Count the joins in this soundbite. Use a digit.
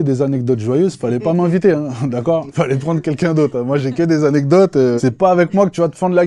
2